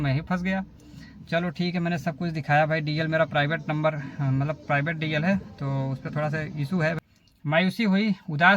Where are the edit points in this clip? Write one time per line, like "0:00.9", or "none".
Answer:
0:07.1